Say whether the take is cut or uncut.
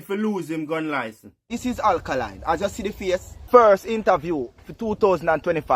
cut